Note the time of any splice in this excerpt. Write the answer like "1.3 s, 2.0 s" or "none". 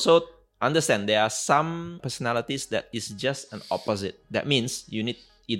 2.0 s, 4.2 s